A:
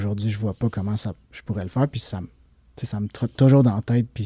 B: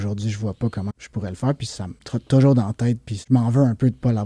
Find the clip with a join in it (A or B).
B